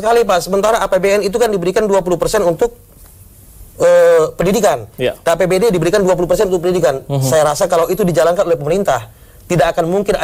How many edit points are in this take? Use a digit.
0